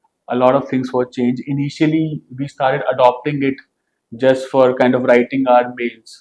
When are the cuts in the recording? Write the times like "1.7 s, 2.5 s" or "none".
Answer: none